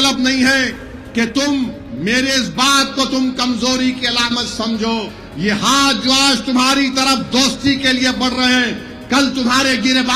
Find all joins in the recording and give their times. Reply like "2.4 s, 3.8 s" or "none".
5.2 s